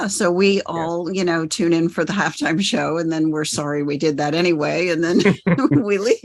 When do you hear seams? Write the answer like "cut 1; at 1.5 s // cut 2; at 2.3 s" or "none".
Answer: none